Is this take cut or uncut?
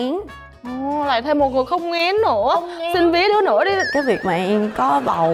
cut